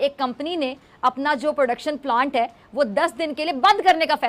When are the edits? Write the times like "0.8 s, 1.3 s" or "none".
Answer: none